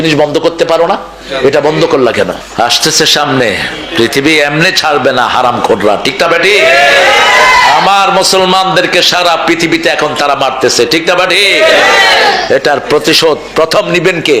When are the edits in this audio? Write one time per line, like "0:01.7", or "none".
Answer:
0:02.4